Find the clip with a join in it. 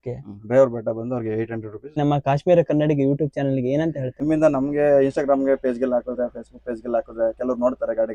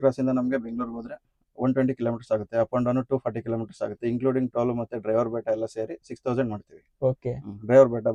first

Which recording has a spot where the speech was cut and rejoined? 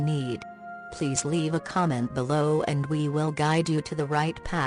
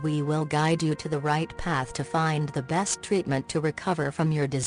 second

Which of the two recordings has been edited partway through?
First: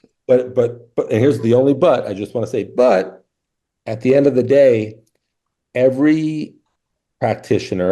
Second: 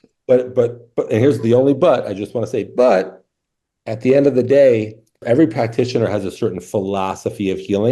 second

